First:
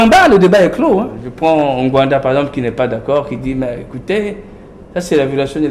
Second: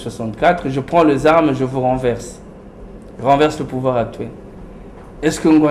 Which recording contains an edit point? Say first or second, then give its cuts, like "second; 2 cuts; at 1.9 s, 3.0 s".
first; 1 cut; at 1.2 s